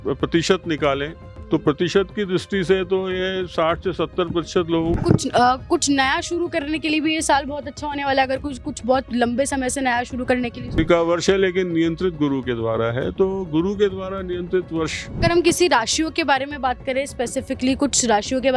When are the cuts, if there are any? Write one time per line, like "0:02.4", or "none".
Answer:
0:04.9
0:10.8
0:15.2